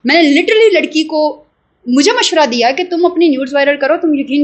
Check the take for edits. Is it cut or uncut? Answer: uncut